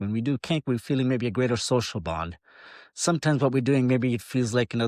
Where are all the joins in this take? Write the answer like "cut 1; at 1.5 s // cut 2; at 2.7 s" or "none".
none

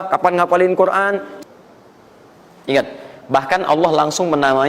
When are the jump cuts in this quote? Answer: cut 1; at 1.3 s

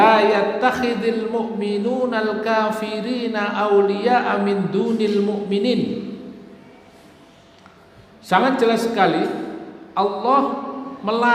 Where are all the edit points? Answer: none

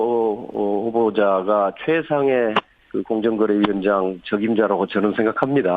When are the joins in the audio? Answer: cut 1; at 4.3 s

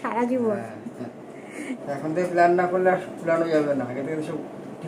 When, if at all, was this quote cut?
none

